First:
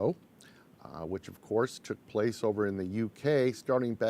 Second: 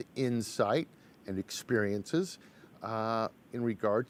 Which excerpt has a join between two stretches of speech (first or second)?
first